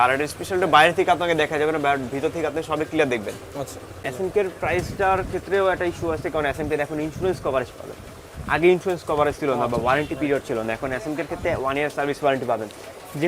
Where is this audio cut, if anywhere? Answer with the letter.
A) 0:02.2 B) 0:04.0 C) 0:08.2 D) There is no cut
B